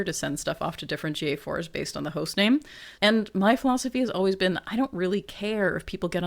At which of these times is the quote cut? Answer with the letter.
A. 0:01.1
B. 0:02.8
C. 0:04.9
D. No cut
B